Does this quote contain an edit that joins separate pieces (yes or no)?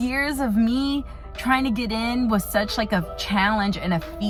no